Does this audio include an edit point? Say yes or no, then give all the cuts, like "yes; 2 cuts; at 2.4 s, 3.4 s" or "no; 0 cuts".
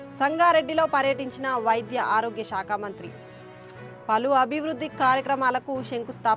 no; 0 cuts